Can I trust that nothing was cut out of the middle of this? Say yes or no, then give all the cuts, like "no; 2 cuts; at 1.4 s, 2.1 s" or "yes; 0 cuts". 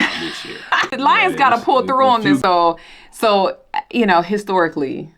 no; 2 cuts; at 0.9 s, 2.4 s